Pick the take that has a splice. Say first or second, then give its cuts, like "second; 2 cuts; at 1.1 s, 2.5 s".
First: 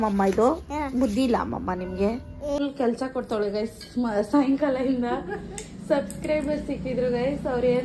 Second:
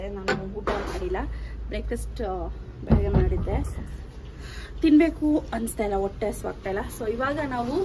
first; 1 cut; at 2.6 s